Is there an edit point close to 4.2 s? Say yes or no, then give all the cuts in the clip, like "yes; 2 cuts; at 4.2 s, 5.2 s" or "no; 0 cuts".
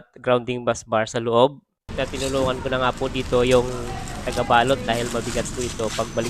no; 1 cut; at 1.9 s